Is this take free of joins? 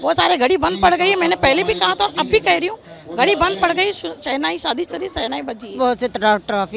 no; 1 cut; at 5.8 s

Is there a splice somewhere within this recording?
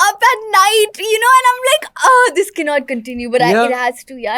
no; 0 cuts

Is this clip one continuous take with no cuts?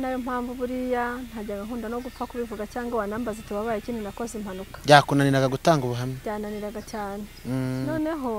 yes; 0 cuts

